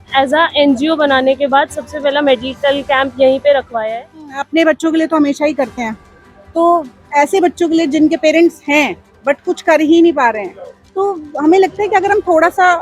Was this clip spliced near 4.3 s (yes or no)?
yes